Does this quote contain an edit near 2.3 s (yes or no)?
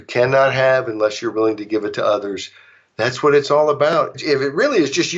no